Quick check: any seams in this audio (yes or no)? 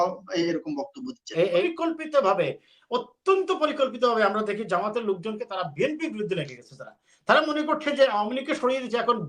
yes